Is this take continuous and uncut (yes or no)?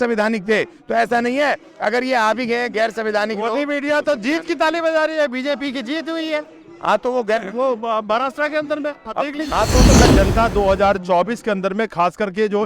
no